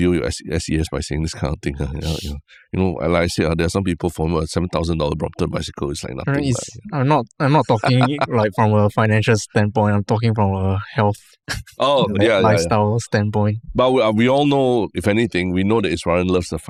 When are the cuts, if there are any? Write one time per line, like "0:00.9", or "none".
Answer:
none